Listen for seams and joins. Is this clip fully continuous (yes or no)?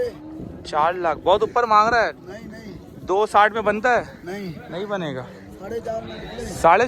yes